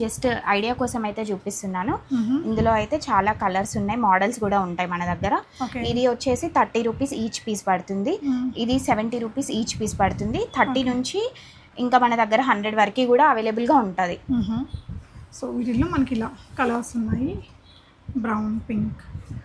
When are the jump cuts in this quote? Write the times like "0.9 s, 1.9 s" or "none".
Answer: none

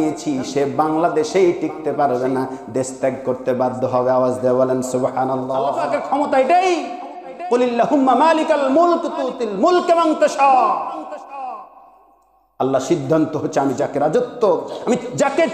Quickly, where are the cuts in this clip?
5.8 s

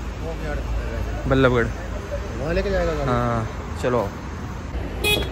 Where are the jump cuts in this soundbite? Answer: none

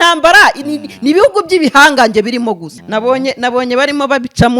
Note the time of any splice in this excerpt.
2.7 s

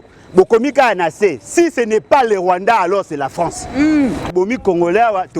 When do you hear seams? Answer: 4.3 s

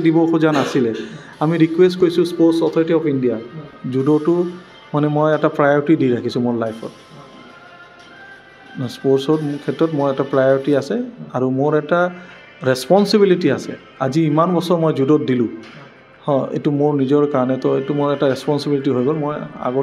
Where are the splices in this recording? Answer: 3.8 s

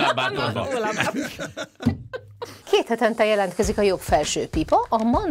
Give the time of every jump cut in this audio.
2.6 s

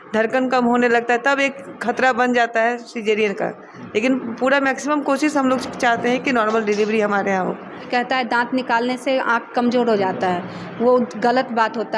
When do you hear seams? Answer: 7.9 s

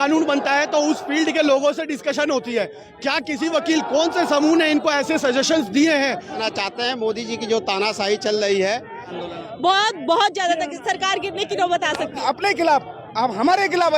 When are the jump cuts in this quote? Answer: 6.4 s, 9.2 s, 12.2 s

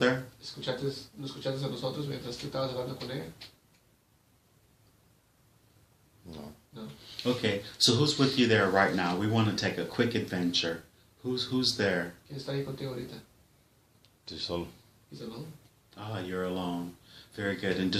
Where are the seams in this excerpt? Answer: 14.9 s

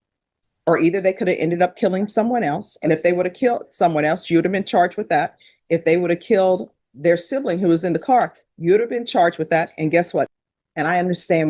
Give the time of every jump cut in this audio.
10.3 s

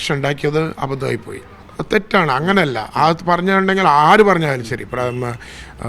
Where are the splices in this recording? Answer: 1.6 s

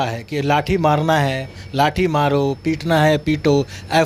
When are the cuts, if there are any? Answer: none

